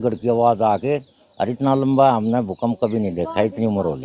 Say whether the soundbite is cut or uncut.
uncut